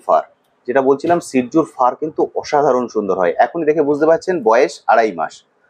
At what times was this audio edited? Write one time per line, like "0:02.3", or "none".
none